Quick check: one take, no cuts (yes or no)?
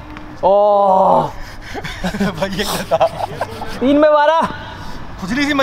yes